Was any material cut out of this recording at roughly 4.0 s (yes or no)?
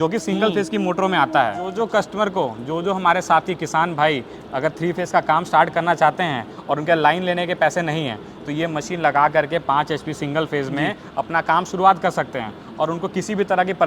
no